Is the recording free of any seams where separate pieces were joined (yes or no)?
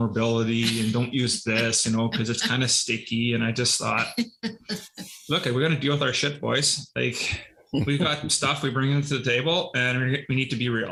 yes